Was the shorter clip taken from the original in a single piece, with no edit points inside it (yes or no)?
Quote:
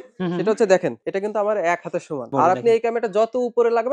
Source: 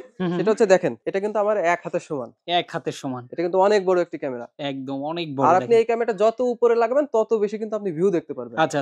no